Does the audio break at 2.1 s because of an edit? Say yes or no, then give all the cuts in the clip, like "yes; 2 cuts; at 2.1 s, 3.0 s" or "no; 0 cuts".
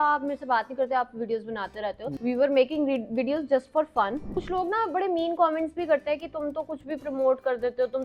yes; 2 cuts; at 2.1 s, 4.2 s